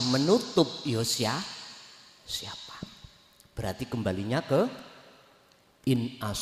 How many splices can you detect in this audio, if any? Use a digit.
0